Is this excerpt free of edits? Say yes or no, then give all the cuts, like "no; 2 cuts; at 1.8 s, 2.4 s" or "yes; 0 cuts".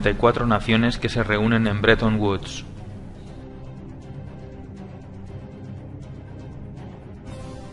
no; 1 cut; at 1.0 s